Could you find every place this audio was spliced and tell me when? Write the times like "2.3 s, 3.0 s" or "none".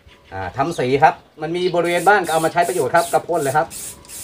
1.3 s